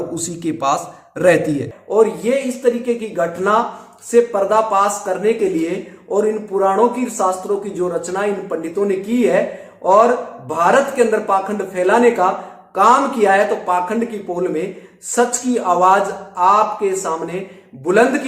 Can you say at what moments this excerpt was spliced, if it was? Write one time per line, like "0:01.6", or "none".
0:01.8

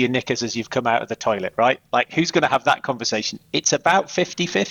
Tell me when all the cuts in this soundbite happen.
none

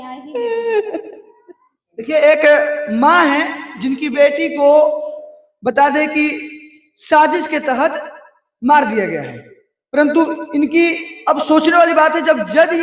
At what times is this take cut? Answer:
none

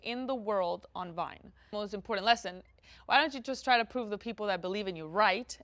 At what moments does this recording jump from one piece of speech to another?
0:01.7

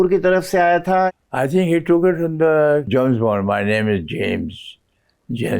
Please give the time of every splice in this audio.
0:01.1
0:02.9

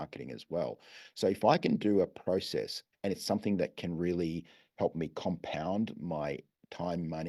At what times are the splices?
0:02.8

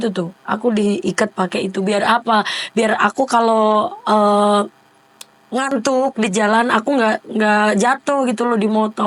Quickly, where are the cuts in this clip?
none

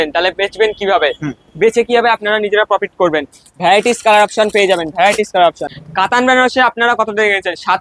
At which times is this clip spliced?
none

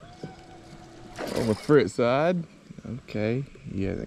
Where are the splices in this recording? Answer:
none

